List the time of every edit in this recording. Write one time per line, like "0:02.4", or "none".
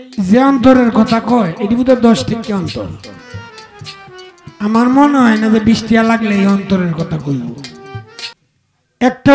0:08.3